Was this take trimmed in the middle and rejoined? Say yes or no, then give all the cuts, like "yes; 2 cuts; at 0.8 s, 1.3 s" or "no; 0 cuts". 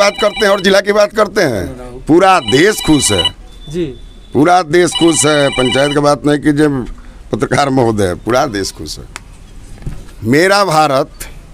no; 0 cuts